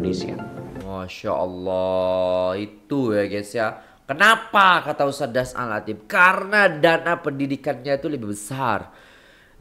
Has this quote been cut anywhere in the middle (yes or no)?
no